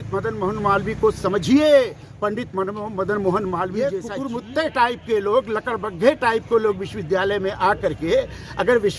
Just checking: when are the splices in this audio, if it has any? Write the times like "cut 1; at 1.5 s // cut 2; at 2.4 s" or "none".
cut 1; at 3.9 s

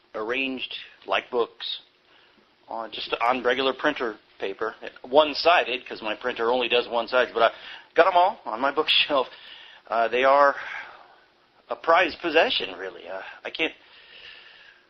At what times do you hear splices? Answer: none

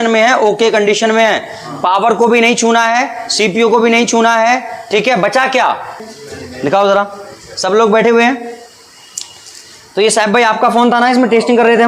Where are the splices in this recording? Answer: cut 1; at 6.0 s

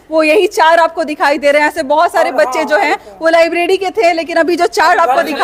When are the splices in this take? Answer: none

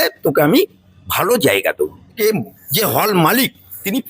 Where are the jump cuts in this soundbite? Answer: cut 1; at 2.2 s

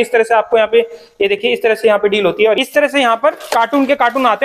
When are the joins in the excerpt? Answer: cut 1; at 2.6 s

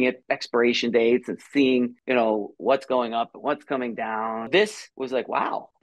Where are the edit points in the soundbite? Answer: cut 1; at 4.5 s

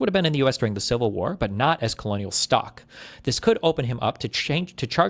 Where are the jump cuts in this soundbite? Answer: none

